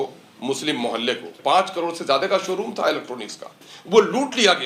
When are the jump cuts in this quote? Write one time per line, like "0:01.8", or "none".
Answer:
0:01.3

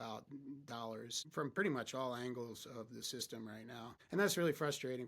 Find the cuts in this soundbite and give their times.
0:01.2
0:04.0

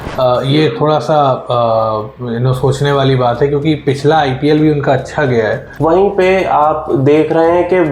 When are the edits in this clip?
0:05.6

